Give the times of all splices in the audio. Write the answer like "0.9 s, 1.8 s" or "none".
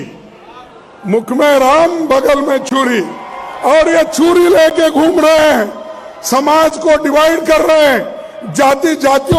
none